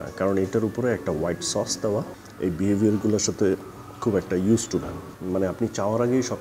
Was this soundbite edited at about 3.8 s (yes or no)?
no